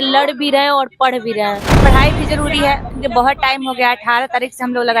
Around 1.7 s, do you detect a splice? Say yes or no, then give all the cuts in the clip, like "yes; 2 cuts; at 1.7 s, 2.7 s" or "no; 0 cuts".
yes; 1 cut; at 1.7 s